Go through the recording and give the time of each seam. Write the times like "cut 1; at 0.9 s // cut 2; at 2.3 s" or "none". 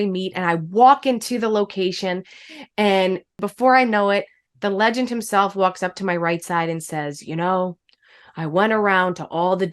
cut 1; at 3.4 s